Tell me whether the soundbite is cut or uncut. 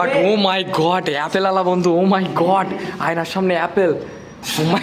uncut